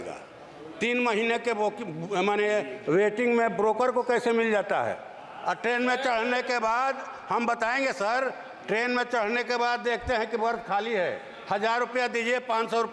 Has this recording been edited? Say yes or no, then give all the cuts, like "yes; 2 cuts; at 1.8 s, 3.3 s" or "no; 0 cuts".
no; 0 cuts